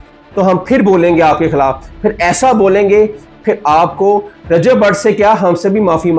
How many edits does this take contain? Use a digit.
0